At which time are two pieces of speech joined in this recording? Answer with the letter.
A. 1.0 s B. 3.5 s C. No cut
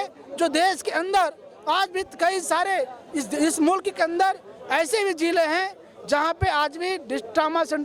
C